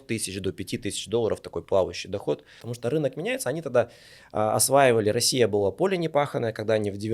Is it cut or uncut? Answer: cut